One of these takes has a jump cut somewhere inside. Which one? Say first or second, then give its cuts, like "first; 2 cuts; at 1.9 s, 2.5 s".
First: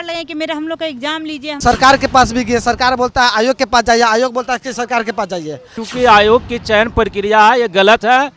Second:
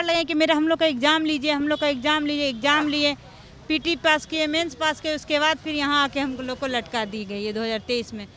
first; 2 cuts; at 1.6 s, 5.8 s